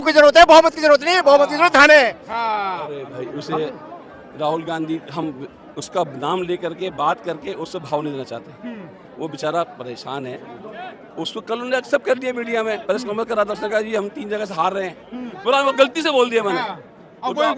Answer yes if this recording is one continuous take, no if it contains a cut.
yes